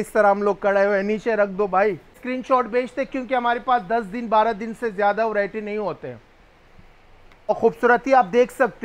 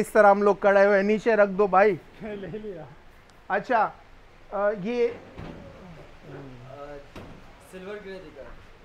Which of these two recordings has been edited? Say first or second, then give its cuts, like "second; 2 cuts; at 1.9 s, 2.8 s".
first; 2 cuts; at 2.2 s, 7.5 s